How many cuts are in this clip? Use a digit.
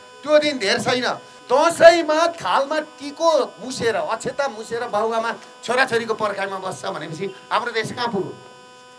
1